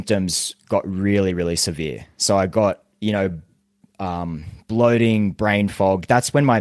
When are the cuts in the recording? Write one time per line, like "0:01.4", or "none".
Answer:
none